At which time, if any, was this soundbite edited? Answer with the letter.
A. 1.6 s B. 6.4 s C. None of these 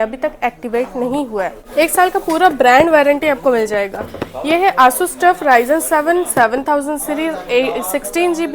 A